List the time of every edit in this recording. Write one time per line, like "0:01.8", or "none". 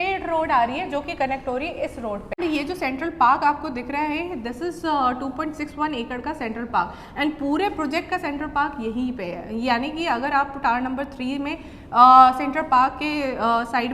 0:02.3

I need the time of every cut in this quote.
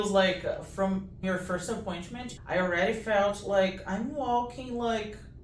0:01.2
0:02.3

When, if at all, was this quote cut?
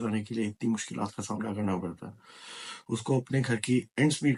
none

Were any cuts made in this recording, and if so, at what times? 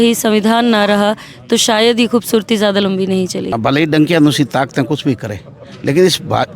0:03.6

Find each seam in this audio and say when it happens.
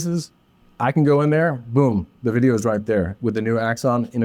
none

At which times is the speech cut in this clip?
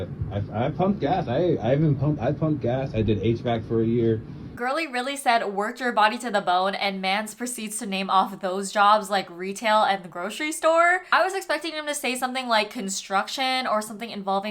0:04.6

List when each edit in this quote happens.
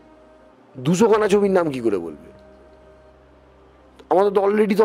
none

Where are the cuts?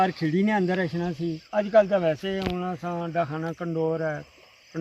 0:01.4

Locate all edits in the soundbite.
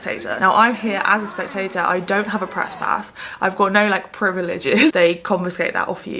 0:04.9

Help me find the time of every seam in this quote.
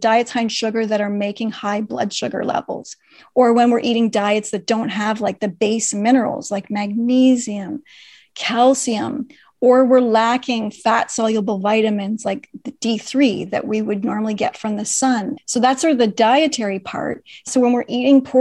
0:15.3
0:17.5

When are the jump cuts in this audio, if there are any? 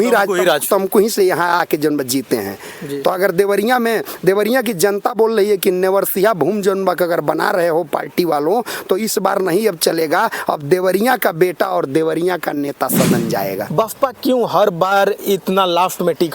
0:13.6

